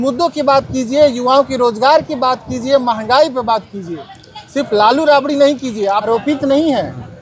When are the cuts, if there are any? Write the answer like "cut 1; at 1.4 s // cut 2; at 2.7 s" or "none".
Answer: cut 1; at 6.1 s